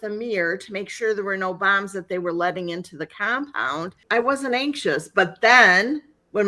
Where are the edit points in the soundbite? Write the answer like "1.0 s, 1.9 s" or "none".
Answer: 4.0 s